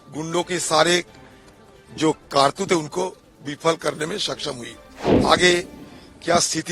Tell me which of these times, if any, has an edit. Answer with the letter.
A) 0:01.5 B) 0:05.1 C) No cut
B